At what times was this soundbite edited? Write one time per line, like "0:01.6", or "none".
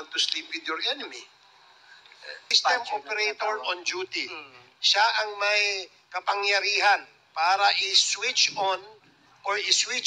0:02.5